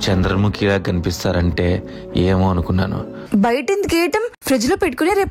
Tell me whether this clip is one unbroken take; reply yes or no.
no